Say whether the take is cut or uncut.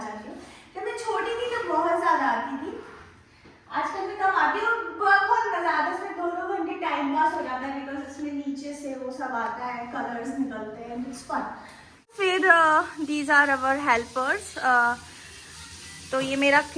cut